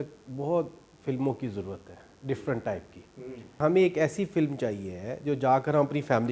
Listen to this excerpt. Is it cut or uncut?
cut